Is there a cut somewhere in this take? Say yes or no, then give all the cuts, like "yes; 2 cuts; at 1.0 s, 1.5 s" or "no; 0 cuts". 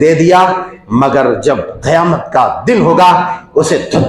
no; 0 cuts